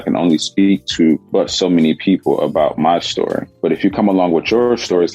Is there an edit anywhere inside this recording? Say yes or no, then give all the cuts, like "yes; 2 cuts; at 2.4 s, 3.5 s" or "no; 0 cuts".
yes; 2 cuts; at 1.2 s, 3.5 s